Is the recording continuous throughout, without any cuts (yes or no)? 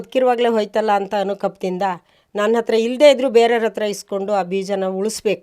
yes